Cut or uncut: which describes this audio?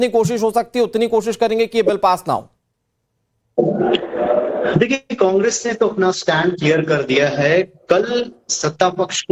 uncut